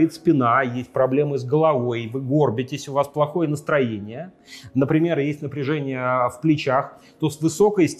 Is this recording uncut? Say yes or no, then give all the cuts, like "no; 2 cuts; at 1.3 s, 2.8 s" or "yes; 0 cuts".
yes; 0 cuts